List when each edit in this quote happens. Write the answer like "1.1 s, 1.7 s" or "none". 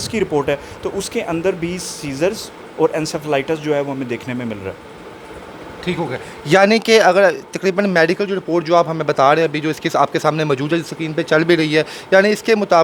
none